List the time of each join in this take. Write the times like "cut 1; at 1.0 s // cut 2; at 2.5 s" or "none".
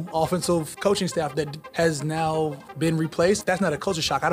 cut 1; at 1.6 s // cut 2; at 2.6 s // cut 3; at 3.4 s